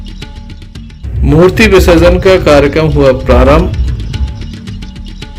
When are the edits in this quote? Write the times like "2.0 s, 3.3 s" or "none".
1.0 s

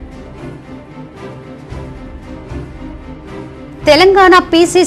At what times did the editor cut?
1.1 s

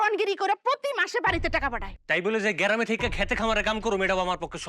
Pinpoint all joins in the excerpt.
1.9 s

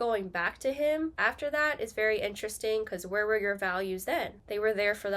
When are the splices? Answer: 1.2 s

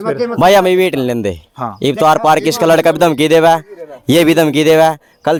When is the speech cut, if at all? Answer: none

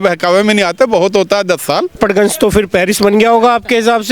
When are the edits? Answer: 1.9 s

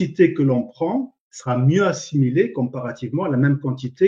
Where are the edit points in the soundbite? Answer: none

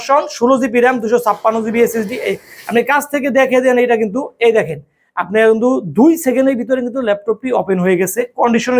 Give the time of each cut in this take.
none

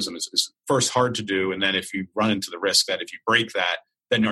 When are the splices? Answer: none

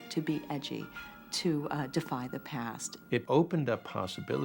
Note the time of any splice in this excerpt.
3.2 s

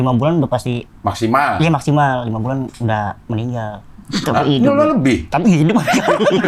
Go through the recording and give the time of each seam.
none

